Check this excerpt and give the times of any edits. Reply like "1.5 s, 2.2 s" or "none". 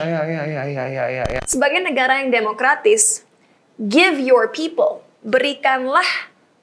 1.4 s